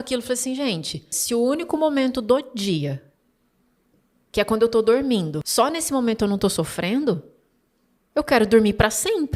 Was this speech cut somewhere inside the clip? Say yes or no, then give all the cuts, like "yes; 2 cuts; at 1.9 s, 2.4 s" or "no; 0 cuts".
yes; 2 cuts; at 1.1 s, 5.4 s